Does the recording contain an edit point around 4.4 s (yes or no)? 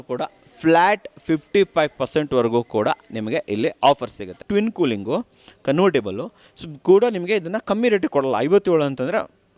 yes